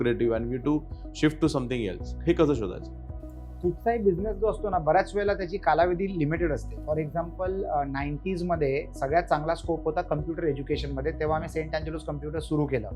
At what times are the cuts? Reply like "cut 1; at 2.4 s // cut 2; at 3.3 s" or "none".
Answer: none